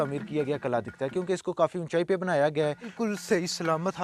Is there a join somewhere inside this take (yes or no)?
yes